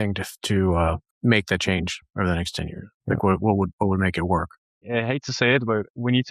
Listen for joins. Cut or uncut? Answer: cut